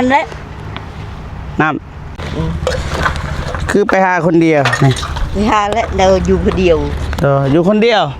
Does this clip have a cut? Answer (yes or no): yes